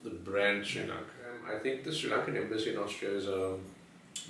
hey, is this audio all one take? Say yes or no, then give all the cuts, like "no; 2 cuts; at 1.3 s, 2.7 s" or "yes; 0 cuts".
no; 1 cut; at 1.5 s